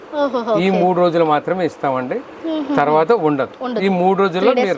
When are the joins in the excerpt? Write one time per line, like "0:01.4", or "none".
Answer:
none